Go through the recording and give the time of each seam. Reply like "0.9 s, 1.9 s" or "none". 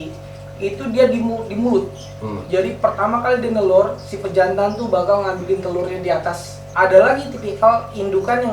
6.6 s